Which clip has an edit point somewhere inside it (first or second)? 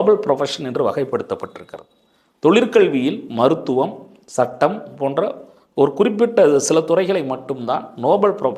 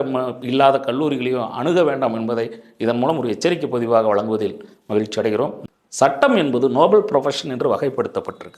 second